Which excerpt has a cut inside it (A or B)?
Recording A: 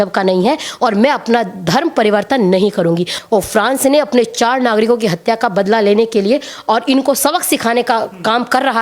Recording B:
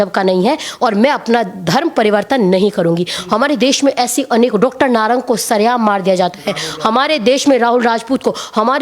A